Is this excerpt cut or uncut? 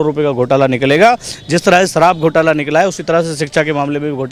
uncut